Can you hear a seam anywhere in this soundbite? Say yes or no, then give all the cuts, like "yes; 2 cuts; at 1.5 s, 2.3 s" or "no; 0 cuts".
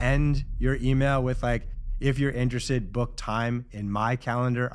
no; 0 cuts